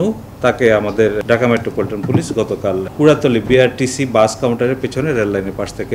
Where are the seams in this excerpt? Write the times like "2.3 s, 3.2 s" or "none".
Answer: 1.2 s, 2.9 s